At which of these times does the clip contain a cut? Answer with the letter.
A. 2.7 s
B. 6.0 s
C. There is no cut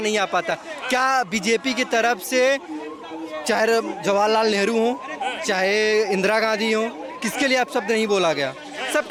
C